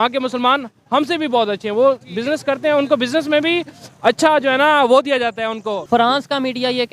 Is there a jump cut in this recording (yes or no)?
yes